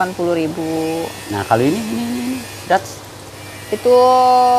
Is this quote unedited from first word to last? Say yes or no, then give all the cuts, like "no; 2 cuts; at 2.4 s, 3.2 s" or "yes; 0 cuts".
yes; 0 cuts